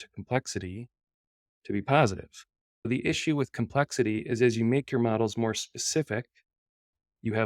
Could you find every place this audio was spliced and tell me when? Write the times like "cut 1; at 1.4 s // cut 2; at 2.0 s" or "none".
cut 1; at 2.7 s